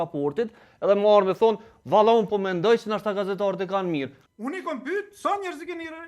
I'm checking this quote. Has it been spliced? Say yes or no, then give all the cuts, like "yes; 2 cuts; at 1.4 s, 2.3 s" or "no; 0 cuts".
yes; 1 cut; at 4.2 s